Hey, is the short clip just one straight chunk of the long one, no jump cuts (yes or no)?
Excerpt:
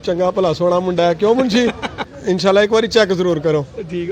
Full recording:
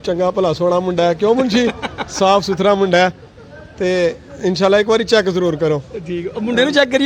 no